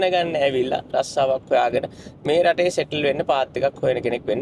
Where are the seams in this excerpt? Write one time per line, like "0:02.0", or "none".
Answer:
none